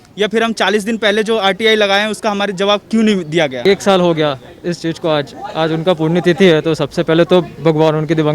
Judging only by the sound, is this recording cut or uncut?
cut